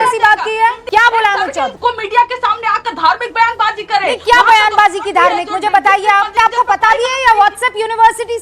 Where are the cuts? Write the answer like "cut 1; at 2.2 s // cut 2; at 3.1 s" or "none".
cut 1; at 0.8 s // cut 2; at 1.7 s // cut 3; at 6.3 s